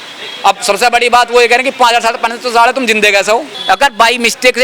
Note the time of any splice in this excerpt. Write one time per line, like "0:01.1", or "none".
0:03.5